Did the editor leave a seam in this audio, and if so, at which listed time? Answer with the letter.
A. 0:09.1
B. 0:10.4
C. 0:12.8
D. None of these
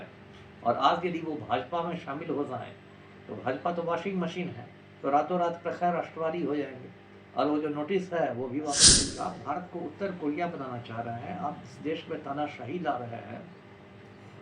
A